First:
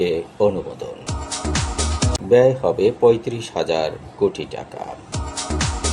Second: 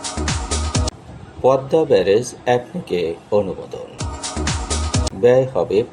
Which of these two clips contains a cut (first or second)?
second